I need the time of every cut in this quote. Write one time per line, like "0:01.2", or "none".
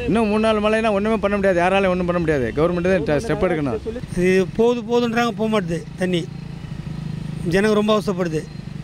0:04.0